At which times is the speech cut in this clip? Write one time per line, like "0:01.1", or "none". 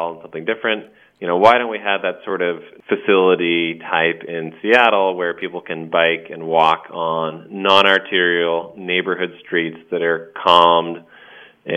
0:02.7